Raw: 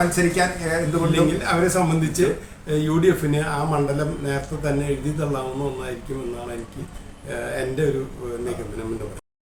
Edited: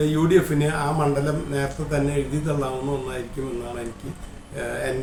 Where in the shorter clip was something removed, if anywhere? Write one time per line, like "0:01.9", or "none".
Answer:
none